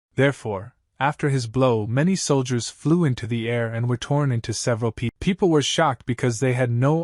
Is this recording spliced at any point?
yes; 1 cut; at 5.2 s

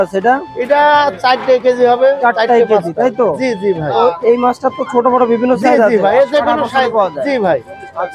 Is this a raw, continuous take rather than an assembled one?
yes; 0 cuts

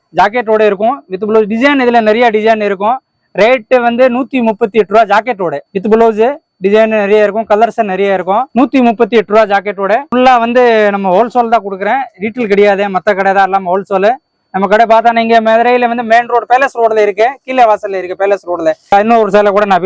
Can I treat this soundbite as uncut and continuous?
yes; 0 cuts

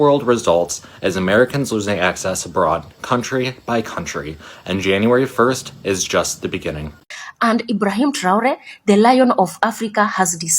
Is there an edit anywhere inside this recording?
yes; 1 cut; at 7.0 s

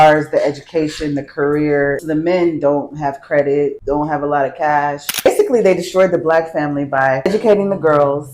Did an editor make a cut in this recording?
yes; 4 cuts; at 2.0 s, 3.8 s, 5.3 s, 7.3 s

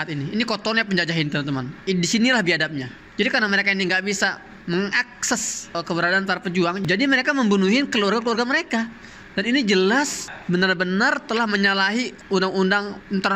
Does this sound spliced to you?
no; 0 cuts

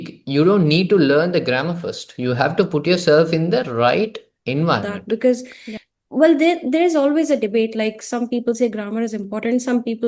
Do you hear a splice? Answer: yes; 2 cuts; at 4.8 s, 5.5 s

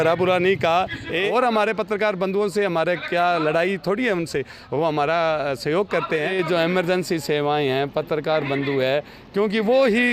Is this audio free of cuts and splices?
no; 2 cuts; at 1.3 s, 6.3 s

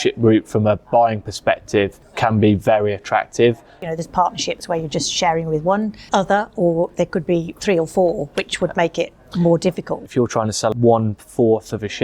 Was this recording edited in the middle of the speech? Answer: yes; 4 cuts; at 2.0 s, 3.8 s, 6.0 s, 10.2 s

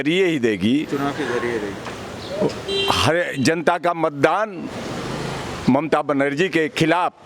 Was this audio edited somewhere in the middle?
no; 0 cuts

